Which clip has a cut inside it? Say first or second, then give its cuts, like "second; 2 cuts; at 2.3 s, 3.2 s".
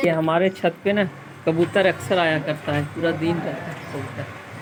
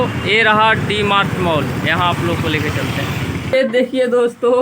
second; 1 cut; at 3.5 s